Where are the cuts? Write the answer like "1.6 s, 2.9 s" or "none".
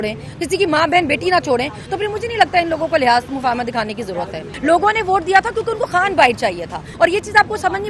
4.5 s, 6.8 s